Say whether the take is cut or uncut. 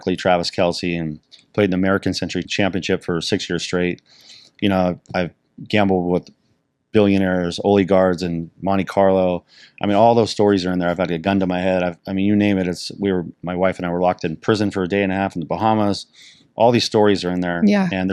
cut